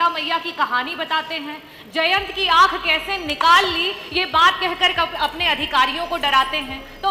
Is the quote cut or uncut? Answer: uncut